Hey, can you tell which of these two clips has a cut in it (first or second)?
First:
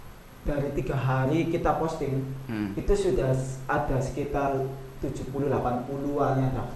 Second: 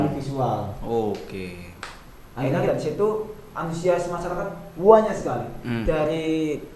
second